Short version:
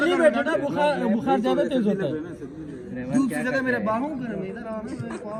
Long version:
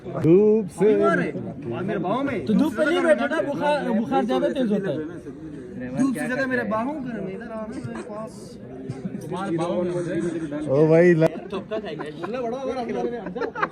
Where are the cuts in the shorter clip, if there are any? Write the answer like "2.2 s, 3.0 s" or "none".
none